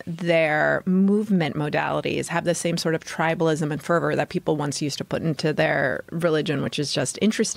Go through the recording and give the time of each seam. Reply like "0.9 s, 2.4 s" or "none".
6.1 s

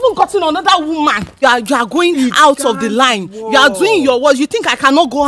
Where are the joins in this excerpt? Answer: 1.4 s

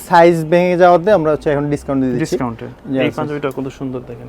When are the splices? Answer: 2.7 s

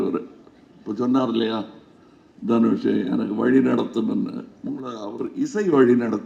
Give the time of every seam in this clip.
none

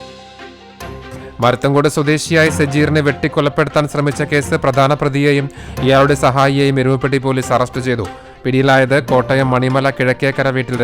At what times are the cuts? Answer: 1.2 s

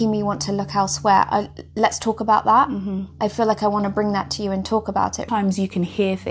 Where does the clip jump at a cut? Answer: 5.3 s

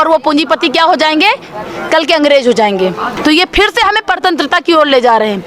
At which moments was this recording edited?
3.1 s

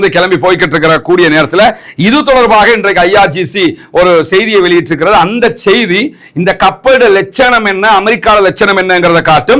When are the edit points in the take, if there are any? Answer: none

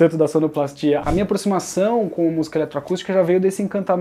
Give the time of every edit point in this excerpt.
1.0 s

